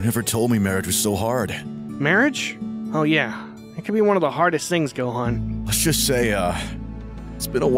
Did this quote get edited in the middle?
no; 0 cuts

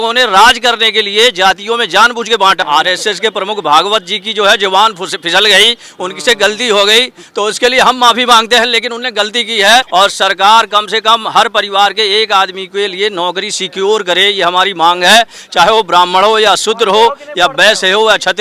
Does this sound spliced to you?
yes; 2 cuts; at 2.6 s, 9.9 s

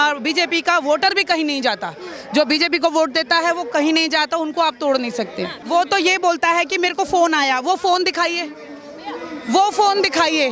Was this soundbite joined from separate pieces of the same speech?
yes; 1 cut; at 5.6 s

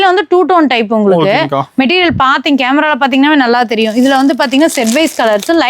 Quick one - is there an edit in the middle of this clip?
no; 0 cuts

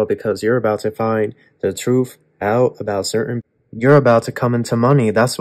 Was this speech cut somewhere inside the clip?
yes; 1 cut; at 3.4 s

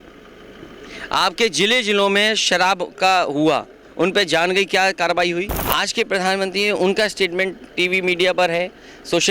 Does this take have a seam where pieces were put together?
yes; 1 cut; at 5.6 s

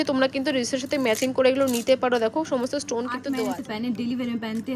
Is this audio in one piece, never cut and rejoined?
no; 1 cut; at 3.2 s

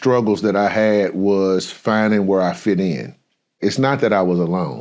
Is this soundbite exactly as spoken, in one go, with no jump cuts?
no; 1 cut; at 3.6 s

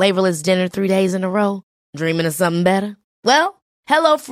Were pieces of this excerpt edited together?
no; 0 cuts

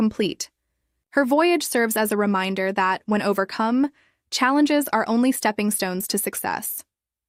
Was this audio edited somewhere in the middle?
no; 0 cuts

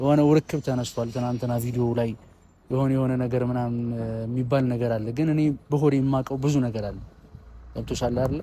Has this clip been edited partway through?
no; 0 cuts

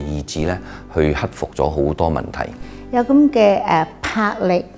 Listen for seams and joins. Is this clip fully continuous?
no; 1 cut; at 2.8 s

